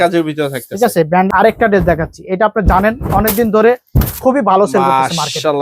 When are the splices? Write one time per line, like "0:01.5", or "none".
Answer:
0:01.3